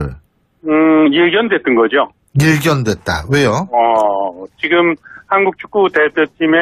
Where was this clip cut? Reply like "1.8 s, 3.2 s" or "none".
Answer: 5.1 s